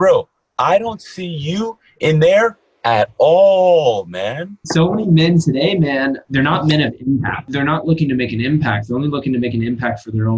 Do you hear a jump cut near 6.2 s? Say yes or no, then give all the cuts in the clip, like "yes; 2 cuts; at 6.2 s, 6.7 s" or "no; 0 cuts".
yes; 3 cuts; at 4.5 s, 6.2 s, 7.4 s